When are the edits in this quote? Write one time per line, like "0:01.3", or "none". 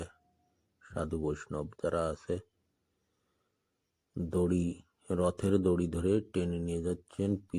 none